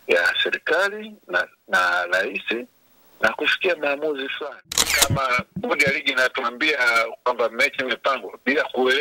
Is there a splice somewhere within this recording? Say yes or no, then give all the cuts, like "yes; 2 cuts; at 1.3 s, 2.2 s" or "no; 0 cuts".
yes; 1 cut; at 4.9 s